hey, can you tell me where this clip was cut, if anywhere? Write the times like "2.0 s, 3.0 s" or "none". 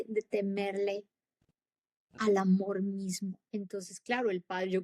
3.4 s